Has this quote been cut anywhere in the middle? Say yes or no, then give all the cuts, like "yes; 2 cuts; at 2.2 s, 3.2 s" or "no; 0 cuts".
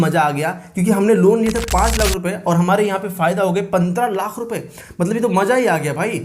no; 0 cuts